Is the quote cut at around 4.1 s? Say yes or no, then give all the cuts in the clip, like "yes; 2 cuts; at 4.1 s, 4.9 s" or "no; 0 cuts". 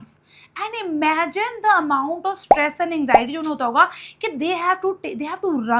no; 0 cuts